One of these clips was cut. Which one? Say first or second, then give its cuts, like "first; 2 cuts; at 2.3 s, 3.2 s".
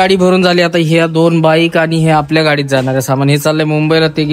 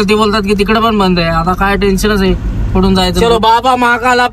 second; 1 cut; at 3.2 s